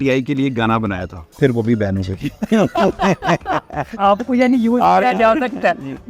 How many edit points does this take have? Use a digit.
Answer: 2